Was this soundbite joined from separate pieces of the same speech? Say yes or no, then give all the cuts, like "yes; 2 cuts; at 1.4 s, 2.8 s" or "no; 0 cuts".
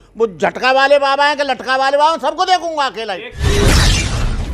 yes; 1 cut; at 3.3 s